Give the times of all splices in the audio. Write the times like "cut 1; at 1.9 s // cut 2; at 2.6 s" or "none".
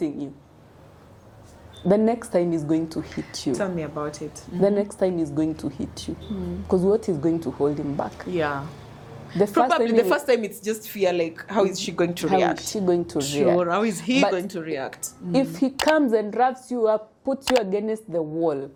none